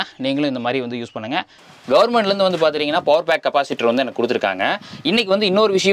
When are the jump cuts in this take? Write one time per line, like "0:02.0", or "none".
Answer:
0:01.6